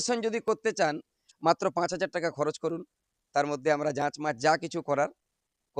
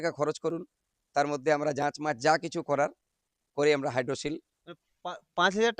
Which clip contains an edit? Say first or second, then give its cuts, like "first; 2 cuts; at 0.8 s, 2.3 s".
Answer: first; 1 cut; at 1.2 s